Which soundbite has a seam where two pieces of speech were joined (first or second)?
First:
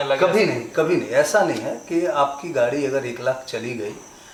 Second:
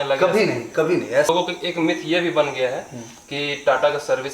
second